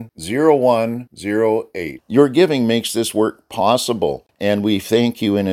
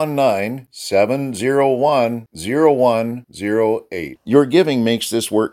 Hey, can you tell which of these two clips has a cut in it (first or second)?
first